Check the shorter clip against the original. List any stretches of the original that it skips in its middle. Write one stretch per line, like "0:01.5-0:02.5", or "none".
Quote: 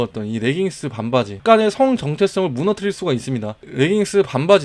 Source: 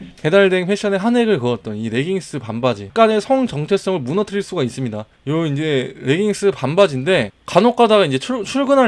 0:05.2-0:05.9